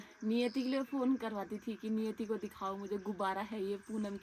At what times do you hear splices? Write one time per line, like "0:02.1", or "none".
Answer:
none

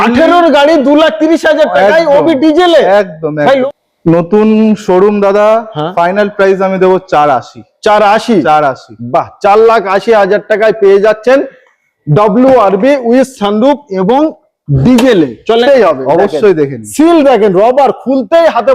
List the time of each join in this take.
0:03.6
0:15.6

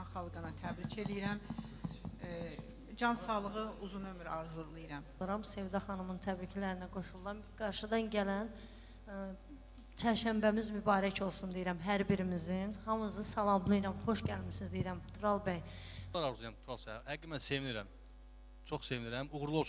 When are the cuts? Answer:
0:05.2
0:16.1

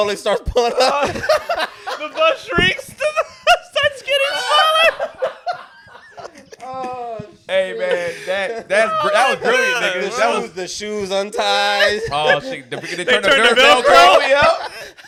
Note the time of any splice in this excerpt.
none

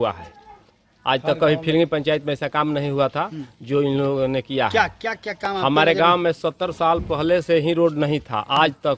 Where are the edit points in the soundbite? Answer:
none

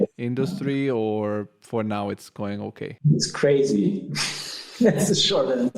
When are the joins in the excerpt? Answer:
0:02.9

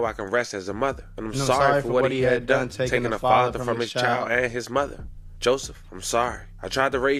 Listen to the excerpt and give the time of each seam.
none

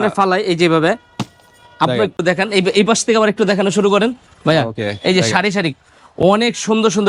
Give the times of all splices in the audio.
0:02.1

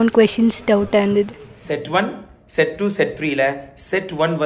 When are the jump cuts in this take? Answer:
0:01.5

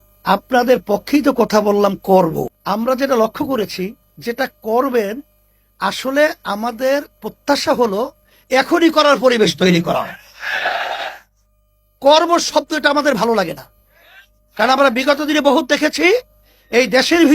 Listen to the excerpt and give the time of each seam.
0:02.6

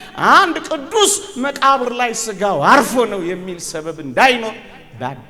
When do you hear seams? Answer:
none

